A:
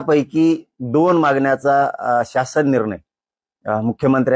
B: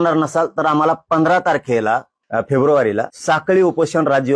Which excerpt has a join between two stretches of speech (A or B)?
B